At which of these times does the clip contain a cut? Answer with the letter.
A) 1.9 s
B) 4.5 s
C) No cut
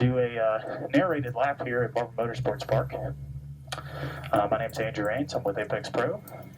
B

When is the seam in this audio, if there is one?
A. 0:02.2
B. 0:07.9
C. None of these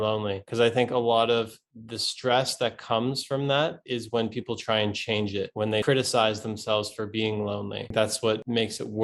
B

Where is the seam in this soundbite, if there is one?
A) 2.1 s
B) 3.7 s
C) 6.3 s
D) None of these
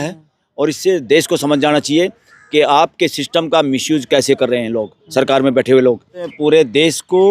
C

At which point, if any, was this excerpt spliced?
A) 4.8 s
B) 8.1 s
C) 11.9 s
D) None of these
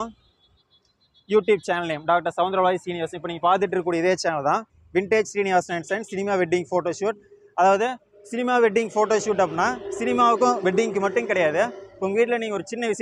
A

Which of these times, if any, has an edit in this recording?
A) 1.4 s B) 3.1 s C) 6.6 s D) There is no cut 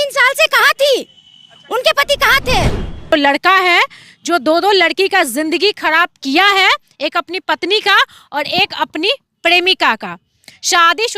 B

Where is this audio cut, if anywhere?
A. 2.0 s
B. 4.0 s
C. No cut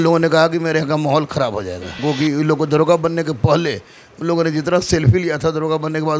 A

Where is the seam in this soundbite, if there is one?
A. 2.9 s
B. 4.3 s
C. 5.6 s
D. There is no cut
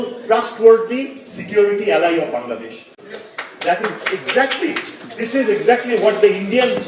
D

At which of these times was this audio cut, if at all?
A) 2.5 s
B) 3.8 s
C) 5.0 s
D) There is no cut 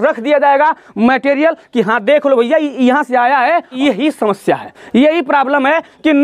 B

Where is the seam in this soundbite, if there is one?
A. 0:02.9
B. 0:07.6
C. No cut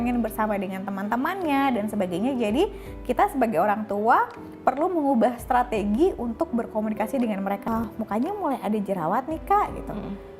B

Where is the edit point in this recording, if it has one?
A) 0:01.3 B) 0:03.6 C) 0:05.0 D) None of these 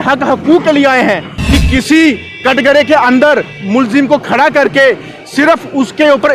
A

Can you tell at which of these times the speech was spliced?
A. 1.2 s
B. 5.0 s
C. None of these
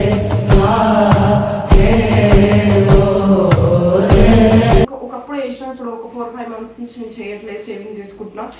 B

